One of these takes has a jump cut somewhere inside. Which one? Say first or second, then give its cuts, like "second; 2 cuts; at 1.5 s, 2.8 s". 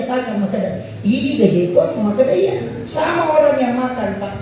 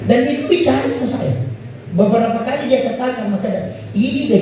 first; 1 cut; at 2.8 s